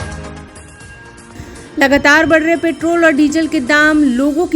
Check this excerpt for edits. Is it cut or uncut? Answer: cut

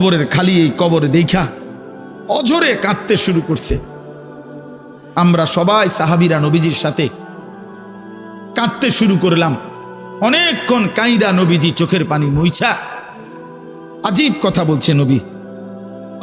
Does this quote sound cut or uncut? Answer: uncut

